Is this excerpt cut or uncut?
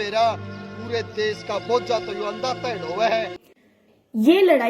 cut